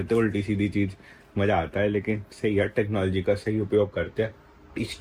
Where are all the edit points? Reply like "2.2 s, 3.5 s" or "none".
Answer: none

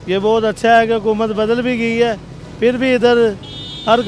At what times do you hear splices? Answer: none

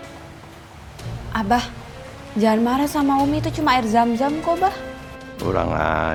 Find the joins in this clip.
none

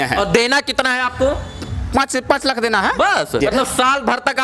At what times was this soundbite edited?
3.4 s

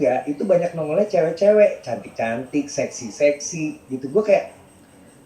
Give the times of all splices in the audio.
none

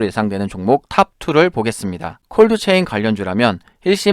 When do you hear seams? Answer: none

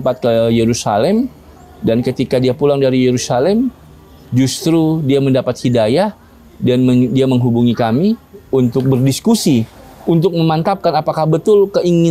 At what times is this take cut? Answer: none

